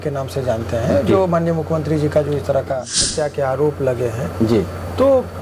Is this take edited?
yes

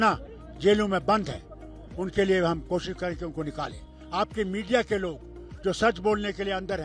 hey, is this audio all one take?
yes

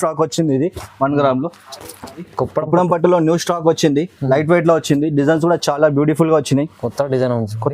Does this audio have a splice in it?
yes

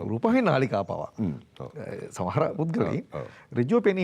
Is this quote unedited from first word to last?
yes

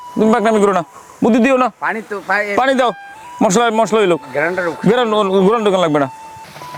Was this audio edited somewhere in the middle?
no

